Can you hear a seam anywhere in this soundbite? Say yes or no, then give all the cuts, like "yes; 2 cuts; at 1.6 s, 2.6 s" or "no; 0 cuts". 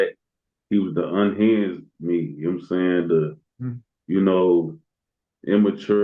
no; 0 cuts